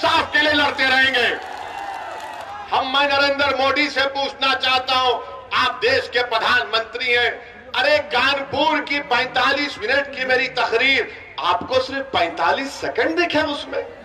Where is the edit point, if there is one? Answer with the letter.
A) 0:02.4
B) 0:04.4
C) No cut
A